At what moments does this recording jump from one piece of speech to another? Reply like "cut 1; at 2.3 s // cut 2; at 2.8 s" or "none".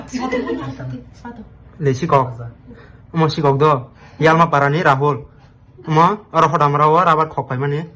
none